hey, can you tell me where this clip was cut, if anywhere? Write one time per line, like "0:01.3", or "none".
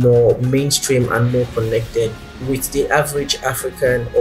0:02.3